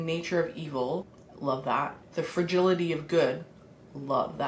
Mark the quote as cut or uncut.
cut